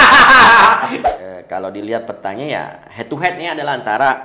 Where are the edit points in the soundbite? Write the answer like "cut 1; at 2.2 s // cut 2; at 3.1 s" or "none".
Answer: cut 1; at 0.9 s